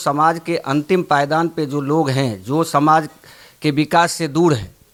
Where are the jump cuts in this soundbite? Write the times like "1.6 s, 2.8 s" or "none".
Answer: none